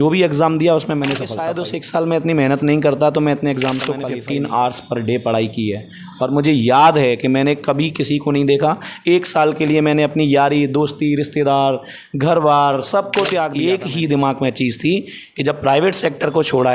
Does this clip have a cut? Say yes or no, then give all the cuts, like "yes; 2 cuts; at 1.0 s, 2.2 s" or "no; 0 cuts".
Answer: yes; 3 cuts; at 1.5 s, 4.0 s, 13.5 s